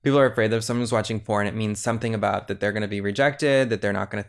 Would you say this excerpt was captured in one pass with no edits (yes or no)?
yes